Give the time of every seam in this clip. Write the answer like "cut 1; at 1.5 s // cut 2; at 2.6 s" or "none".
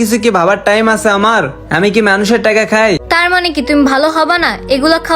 cut 1; at 3.1 s

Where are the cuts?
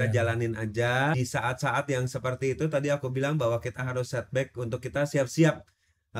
cut 1; at 1.2 s

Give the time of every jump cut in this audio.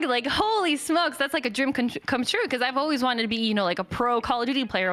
none

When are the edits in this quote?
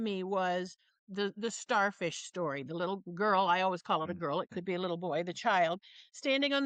none

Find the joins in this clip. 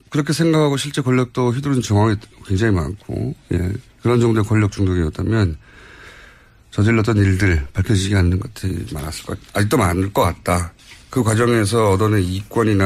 none

